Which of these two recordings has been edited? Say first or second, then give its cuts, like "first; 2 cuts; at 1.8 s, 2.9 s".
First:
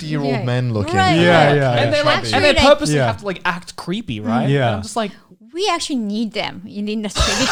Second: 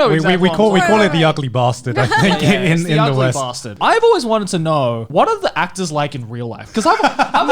second; 2 cuts; at 3.7 s, 5.1 s